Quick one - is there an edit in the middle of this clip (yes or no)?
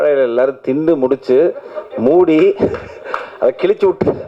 no